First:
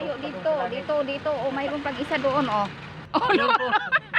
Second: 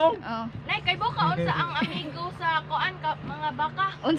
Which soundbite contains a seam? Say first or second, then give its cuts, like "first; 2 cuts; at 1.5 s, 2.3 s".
first; 1 cut; at 2.9 s